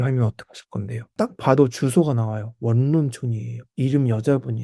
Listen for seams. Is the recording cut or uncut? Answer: cut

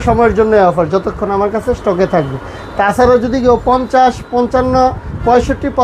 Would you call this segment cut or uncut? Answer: uncut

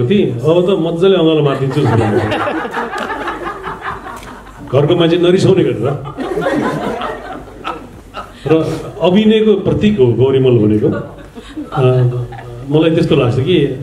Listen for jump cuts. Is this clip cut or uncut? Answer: uncut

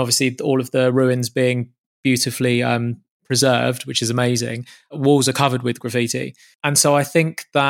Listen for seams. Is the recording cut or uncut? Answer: cut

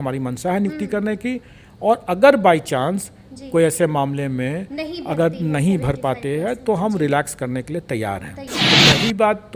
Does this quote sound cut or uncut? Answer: cut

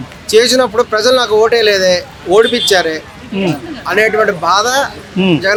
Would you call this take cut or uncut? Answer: uncut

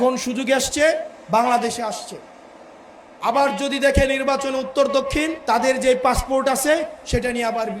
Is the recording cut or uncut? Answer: cut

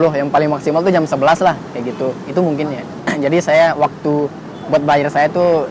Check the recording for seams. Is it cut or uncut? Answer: cut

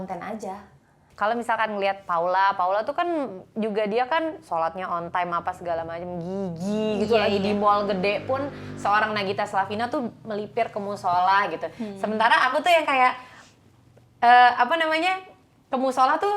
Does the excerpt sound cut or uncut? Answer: cut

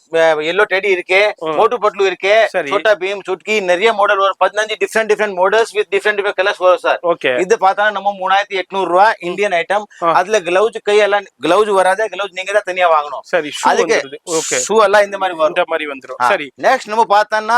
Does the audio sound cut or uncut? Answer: uncut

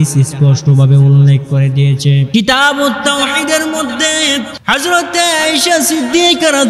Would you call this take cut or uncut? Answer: cut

